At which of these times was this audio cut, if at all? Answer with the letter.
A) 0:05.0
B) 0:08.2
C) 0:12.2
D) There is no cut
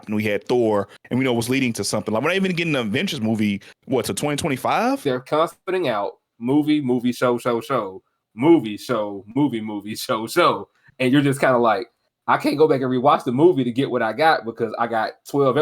A